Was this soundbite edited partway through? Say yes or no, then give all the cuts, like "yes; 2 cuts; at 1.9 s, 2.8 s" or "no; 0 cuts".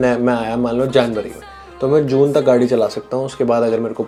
no; 0 cuts